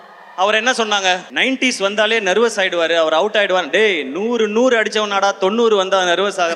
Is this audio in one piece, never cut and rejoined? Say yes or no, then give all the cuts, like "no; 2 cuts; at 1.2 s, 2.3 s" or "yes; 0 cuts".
yes; 0 cuts